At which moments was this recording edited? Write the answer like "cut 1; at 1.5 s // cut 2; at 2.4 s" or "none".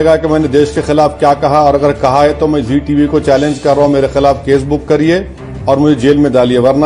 none